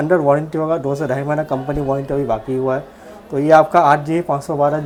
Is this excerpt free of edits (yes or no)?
yes